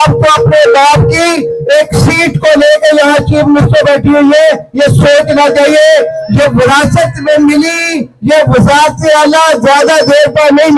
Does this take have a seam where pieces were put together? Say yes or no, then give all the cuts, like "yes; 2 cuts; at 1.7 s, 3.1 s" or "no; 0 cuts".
no; 0 cuts